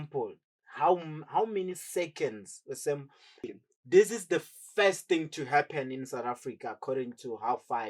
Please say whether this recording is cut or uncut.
cut